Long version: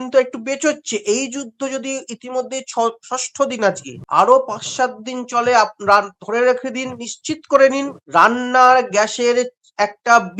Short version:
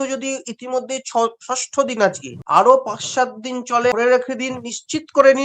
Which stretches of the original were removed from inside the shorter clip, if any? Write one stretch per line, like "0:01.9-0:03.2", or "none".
0:05.5-0:06.3

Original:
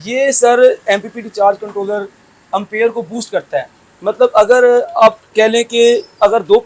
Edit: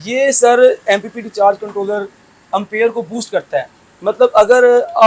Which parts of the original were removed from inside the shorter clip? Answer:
none

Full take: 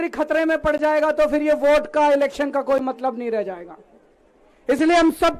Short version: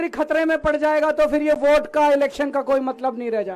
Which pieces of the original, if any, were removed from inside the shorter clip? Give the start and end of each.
none

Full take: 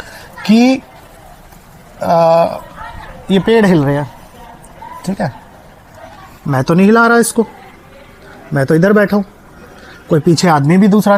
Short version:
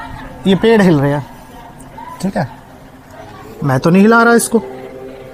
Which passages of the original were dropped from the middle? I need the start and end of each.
none

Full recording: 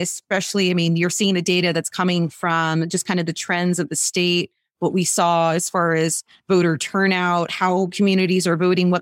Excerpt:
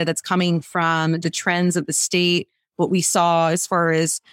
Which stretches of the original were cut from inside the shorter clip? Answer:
0:02.9-0:03.2

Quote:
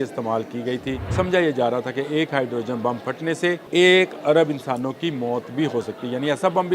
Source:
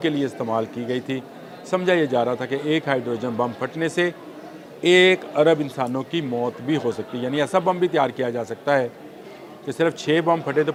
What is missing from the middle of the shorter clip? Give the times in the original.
0:01.3-0:01.6
0:04.2-0:04.7

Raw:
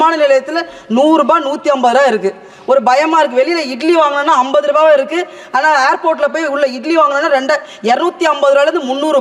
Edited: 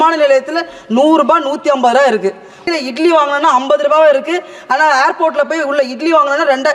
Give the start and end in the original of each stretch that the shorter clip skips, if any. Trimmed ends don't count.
0:02.6-0:03.5

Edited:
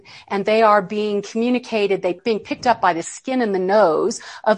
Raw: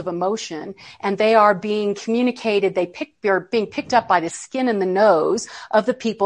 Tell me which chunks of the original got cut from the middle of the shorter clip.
0:02.9-0:03.5

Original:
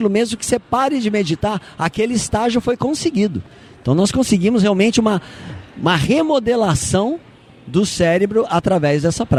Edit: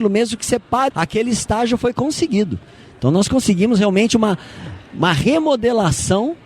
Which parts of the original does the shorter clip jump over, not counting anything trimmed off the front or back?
0:00.9-0:01.7

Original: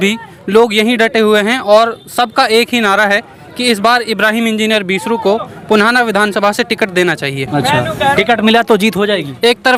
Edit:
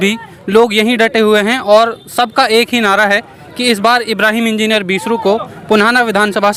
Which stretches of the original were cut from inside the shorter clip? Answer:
none

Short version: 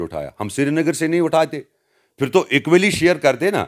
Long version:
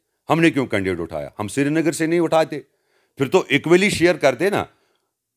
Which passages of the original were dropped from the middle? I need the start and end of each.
none

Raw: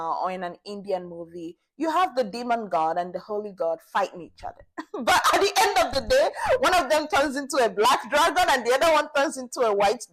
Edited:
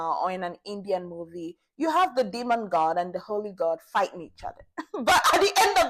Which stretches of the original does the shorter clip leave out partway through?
none

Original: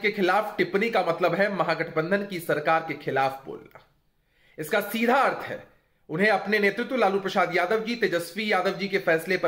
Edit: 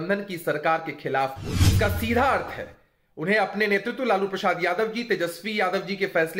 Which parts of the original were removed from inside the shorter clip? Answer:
0:03.6-0:04.5

